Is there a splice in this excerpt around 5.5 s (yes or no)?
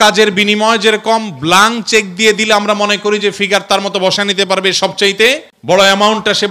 yes